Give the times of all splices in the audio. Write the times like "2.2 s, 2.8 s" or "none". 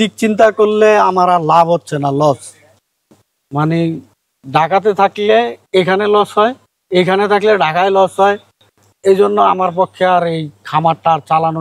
none